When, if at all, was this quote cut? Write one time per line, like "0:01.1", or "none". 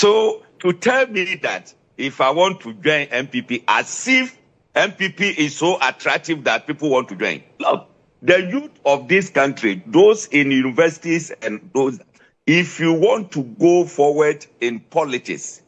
none